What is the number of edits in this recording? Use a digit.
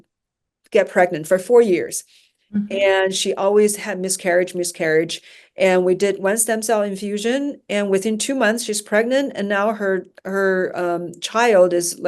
0